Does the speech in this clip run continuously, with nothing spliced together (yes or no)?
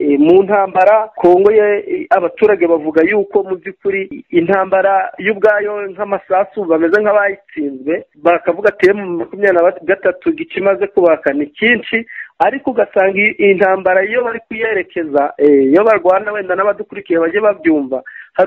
no